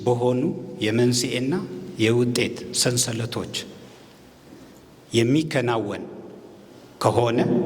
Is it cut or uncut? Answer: uncut